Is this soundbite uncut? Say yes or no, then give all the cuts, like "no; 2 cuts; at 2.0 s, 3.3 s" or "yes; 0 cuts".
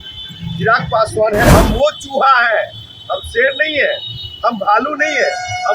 no; 1 cut; at 1.5 s